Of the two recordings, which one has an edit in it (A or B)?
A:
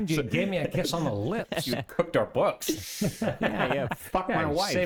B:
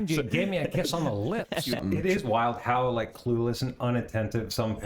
B